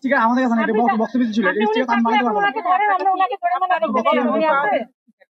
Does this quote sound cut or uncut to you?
uncut